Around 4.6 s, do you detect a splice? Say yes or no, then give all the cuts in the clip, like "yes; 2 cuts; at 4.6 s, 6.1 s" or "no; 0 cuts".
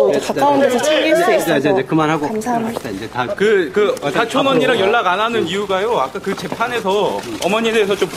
yes; 1 cut; at 4.6 s